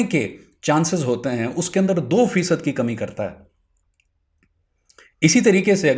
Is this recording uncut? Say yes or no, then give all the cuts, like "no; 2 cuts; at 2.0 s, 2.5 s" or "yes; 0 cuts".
yes; 0 cuts